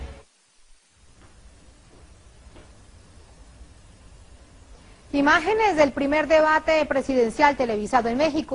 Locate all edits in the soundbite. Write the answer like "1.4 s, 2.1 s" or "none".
none